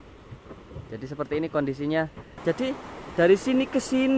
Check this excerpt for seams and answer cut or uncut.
cut